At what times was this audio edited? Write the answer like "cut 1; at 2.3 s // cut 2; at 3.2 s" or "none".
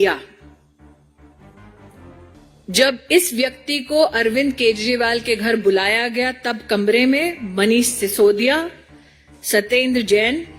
cut 1; at 0.8 s // cut 2; at 2.6 s